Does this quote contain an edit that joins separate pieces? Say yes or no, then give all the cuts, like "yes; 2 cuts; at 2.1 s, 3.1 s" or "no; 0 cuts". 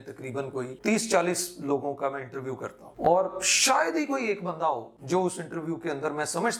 no; 0 cuts